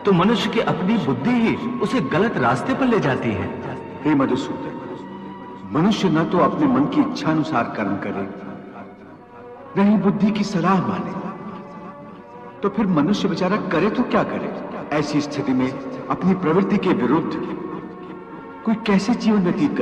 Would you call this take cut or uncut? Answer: cut